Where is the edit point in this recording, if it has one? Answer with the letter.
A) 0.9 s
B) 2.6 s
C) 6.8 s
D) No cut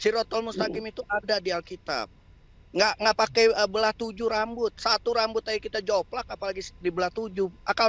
D